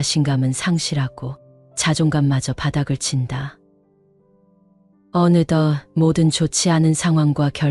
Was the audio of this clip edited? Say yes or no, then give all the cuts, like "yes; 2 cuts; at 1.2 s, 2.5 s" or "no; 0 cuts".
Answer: no; 0 cuts